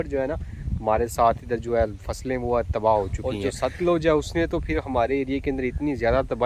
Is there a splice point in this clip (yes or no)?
yes